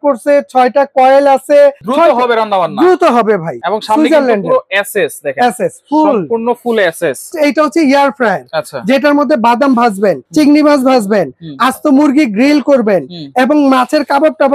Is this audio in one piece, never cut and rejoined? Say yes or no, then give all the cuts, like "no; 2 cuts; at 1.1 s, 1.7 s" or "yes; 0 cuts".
no; 4 cuts; at 1.8 s, 3.6 s, 7.3 s, 10.2 s